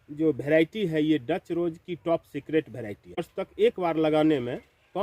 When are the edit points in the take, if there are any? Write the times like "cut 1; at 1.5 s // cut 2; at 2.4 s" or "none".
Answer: cut 1; at 3.3 s

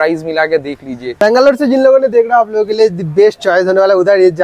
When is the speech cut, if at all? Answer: cut 1; at 1.2 s

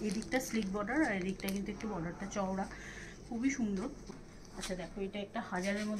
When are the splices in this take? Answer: cut 1; at 4.1 s

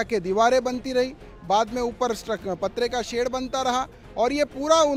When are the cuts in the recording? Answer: none

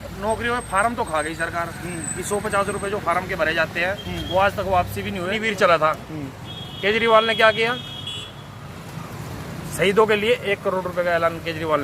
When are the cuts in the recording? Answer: cut 1; at 5.4 s

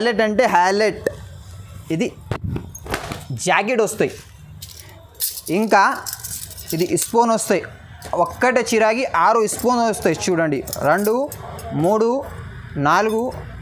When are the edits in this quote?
none

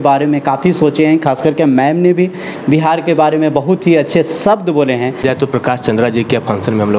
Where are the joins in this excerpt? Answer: cut 1; at 5.2 s

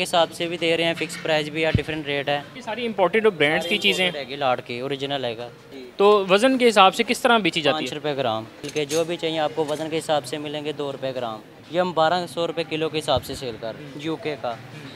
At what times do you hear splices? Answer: cut 1; at 2.6 s // cut 2; at 8.7 s // cut 3; at 11.5 s // cut 4; at 13.8 s

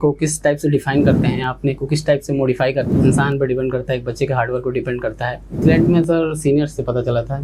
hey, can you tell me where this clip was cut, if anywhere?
cut 1; at 2.9 s // cut 2; at 5.5 s

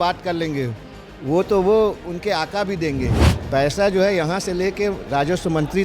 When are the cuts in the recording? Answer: cut 1; at 3.3 s

